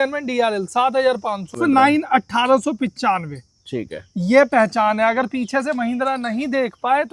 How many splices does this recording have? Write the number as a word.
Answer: one